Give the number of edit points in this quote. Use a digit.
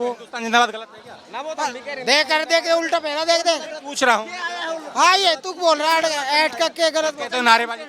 0